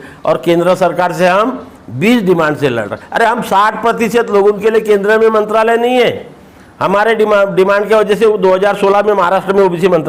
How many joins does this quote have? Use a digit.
0